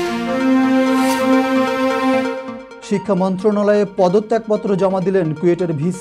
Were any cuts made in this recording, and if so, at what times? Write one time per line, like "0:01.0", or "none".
0:02.5